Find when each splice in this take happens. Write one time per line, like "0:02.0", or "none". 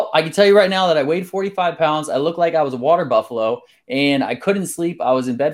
none